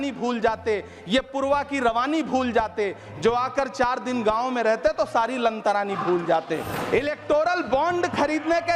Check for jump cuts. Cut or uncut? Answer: cut